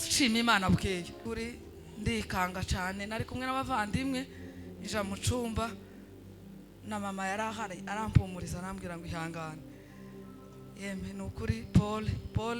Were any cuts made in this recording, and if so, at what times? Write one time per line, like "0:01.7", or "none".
0:01.2

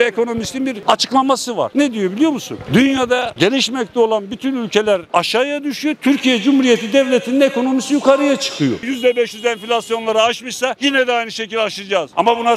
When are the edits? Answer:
0:00.8
0:01.7
0:08.8

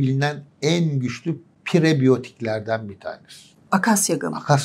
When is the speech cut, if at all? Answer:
none

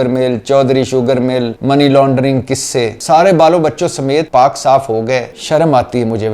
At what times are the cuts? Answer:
0:01.5
0:02.9
0:04.3
0:05.4

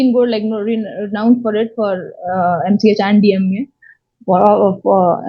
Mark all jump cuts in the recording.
none

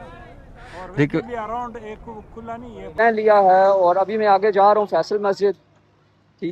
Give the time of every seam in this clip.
0:02.9

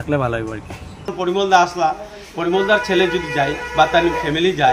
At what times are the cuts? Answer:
0:01.1

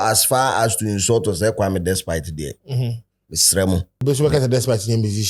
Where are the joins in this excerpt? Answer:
0:04.0

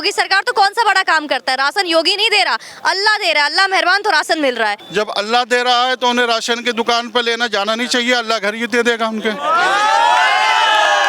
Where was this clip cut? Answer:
0:04.8

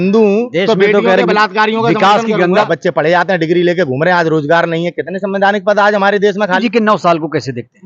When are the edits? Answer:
0:02.5
0:06.6

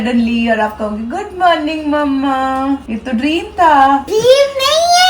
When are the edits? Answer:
0:02.9
0:04.1

